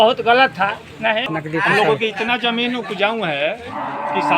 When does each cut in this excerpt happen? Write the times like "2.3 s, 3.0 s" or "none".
1.3 s

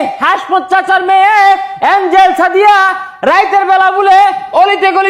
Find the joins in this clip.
none

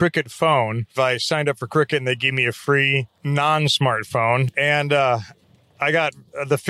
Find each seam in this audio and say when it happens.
0.9 s, 3.1 s, 4.5 s

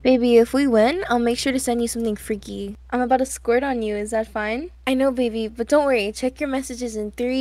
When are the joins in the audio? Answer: 2.8 s, 4.7 s

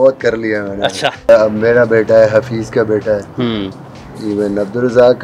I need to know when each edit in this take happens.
1.3 s

